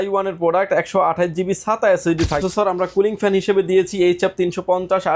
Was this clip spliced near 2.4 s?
yes; 1 cut; at 2.4 s

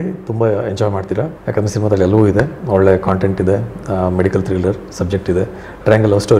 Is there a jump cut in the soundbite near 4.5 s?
no; 1 cut; at 1.4 s

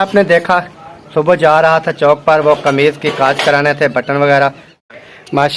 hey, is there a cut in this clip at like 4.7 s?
yes; 1 cut; at 4.7 s

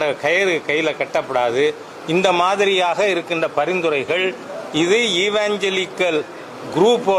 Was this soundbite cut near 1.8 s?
no; 0 cuts

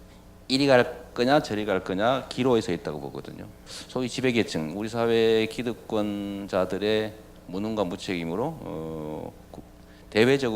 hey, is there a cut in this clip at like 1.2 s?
yes; 1 cut; at 1.2 s

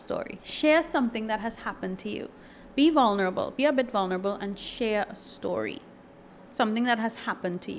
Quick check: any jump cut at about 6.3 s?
no; 1 cut; at 2.6 s

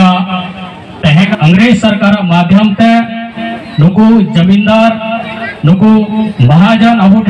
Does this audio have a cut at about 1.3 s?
yes; 1 cut; at 1.3 s

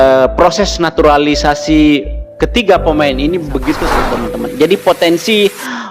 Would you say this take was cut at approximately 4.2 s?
yes; 1 cut; at 4.2 s

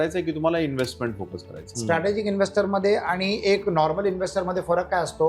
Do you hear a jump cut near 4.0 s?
no; 1 cut; at 1.7 s

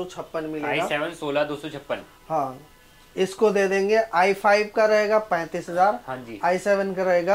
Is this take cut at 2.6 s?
no; 0 cuts

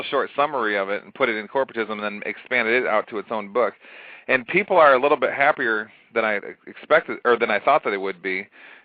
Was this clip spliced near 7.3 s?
no; 0 cuts

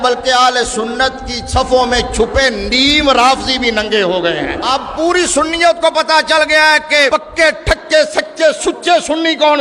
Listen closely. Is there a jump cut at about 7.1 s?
yes; 2 cuts; at 4.6 s, 7.1 s

